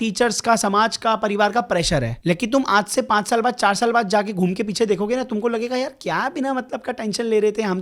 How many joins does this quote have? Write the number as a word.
one